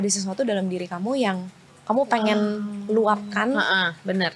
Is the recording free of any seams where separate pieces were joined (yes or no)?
yes